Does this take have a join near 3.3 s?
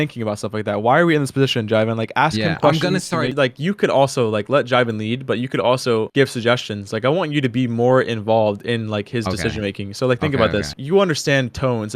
yes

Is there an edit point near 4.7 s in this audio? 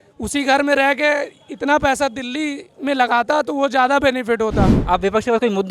yes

